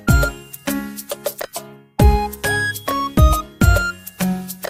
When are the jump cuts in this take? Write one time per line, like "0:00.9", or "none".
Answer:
none